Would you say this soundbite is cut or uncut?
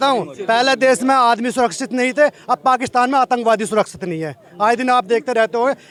uncut